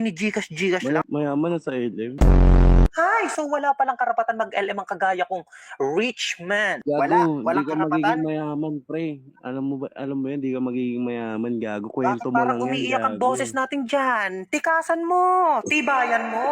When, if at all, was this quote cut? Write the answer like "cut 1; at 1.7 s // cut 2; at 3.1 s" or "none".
cut 1; at 1.0 s